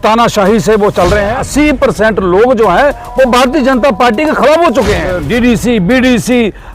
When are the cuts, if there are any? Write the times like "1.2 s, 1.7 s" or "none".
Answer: 1.4 s, 5.1 s